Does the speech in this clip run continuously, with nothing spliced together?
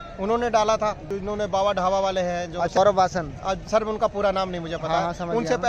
no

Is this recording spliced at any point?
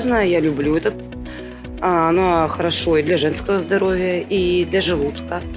no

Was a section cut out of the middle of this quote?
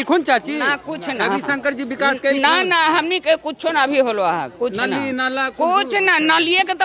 no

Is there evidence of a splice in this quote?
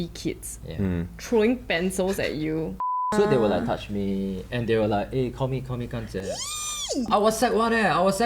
yes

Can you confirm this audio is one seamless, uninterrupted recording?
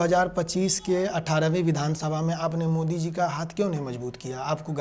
yes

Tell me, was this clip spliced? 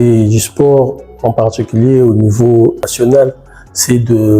yes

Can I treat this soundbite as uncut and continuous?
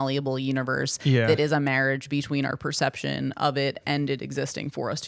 yes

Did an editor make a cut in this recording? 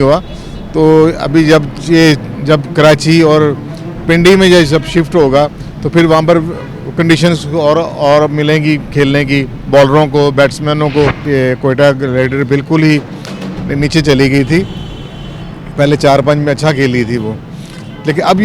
yes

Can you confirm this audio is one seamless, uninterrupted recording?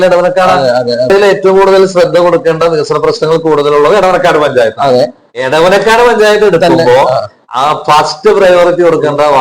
no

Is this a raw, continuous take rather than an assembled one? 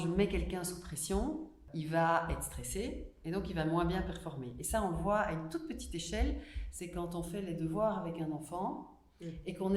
no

